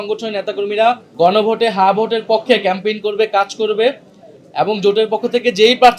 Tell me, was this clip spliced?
yes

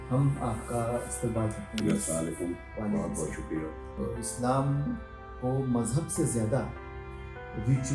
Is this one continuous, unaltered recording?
no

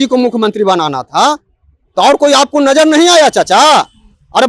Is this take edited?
no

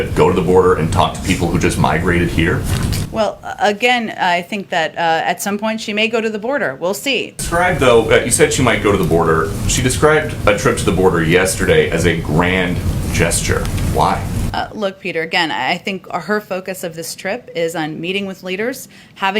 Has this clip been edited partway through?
yes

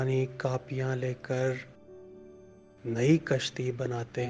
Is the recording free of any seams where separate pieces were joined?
yes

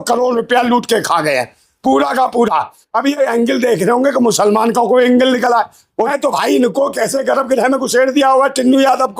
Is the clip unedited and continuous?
no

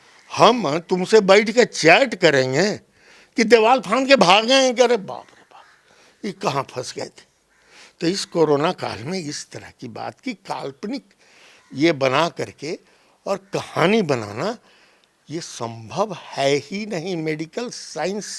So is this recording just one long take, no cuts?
yes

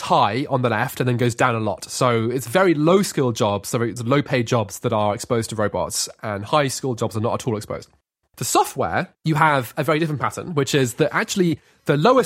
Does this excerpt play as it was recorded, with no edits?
no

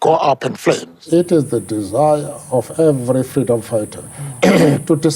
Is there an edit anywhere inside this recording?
yes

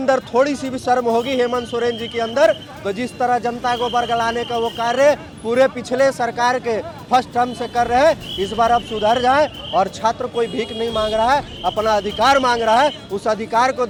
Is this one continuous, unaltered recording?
yes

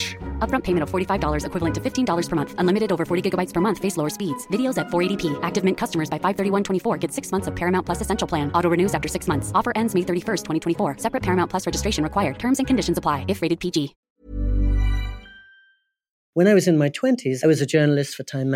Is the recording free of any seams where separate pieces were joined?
no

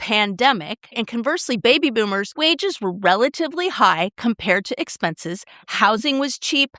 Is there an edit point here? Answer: yes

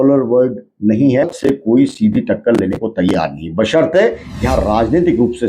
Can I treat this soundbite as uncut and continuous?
no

